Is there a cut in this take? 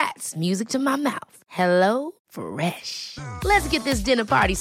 no; 0 cuts

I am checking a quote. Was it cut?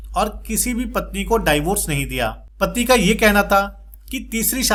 no; 0 cuts

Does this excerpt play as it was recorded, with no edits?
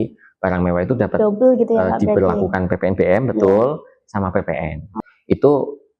no; 1 cut; at 4.9 s

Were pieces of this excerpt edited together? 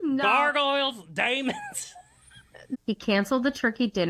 yes; 1 cut; at 2.6 s

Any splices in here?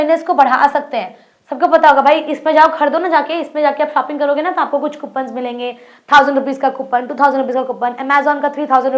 no; 0 cuts

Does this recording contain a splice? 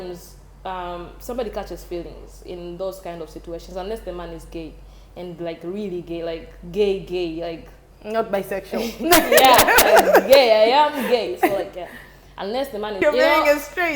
yes; 1 cut; at 13.0 s

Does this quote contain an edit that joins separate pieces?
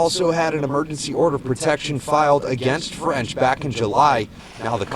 yes; 1 cut; at 1.5 s

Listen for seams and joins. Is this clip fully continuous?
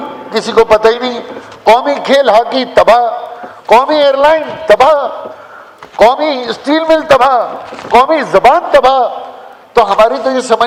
yes; 0 cuts

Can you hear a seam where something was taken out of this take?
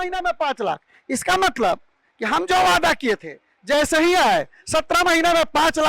no; 0 cuts

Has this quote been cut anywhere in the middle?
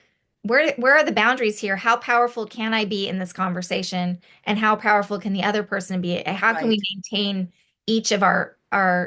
no; 0 cuts

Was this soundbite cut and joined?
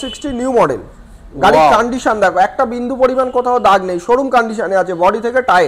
no; 0 cuts

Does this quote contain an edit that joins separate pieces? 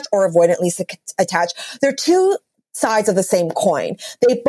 no; 0 cuts

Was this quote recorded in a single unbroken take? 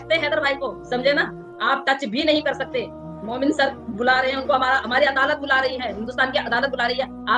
yes; 0 cuts

